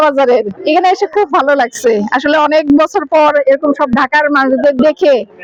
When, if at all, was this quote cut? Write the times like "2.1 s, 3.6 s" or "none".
none